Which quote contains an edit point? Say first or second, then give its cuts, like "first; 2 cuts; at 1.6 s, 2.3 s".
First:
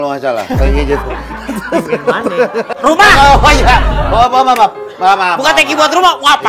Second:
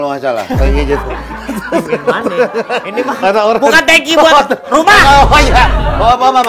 first; 1 cut; at 2.7 s